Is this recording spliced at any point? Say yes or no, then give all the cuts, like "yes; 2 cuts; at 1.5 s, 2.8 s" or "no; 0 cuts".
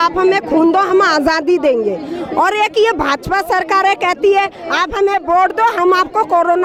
no; 0 cuts